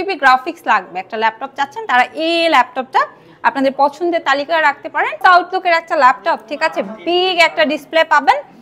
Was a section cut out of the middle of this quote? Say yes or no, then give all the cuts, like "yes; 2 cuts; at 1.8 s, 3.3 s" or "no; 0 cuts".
yes; 1 cut; at 5.2 s